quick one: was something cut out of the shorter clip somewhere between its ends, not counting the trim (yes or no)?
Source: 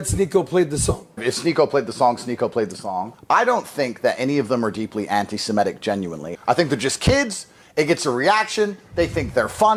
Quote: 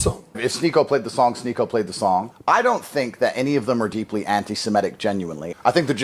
no